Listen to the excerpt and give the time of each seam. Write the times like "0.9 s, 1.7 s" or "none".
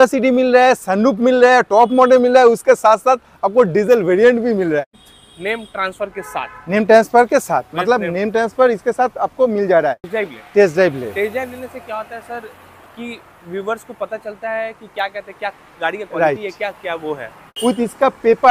5.0 s, 10.0 s, 17.4 s